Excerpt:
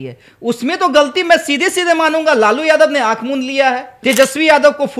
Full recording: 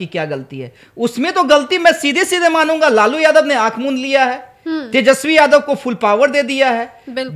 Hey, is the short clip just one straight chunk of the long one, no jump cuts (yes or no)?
no